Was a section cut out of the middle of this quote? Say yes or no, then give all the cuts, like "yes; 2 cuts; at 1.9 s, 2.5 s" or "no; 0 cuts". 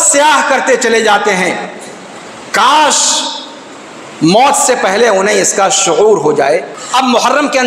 yes; 1 cut; at 6.8 s